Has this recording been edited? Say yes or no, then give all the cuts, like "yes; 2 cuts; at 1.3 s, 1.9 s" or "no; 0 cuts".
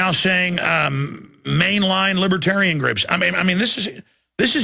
no; 0 cuts